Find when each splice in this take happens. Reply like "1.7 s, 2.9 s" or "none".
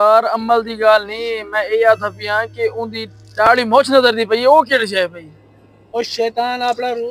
none